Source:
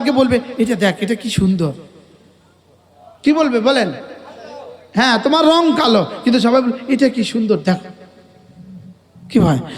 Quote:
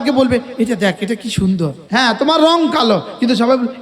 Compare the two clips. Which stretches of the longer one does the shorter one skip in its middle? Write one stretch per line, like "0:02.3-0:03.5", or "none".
0:01.8-0:04.8